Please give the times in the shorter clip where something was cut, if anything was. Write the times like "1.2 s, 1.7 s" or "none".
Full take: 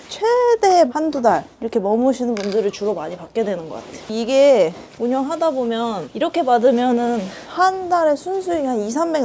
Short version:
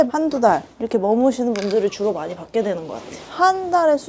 3.2 s